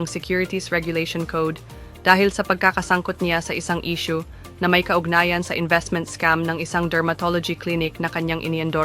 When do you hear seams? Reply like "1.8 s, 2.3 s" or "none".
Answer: 4.4 s